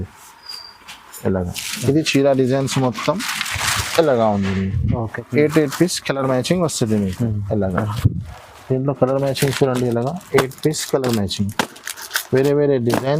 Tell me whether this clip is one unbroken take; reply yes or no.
no